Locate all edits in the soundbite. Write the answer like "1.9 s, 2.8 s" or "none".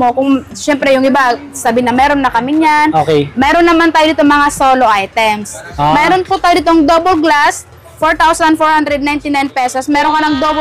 none

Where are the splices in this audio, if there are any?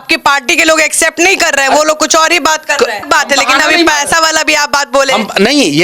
3.0 s

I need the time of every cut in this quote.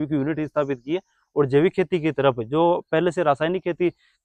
none

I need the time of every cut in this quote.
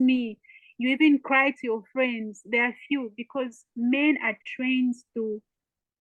none

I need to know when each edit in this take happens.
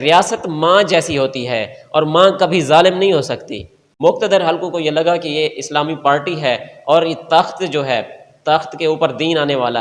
3.8 s

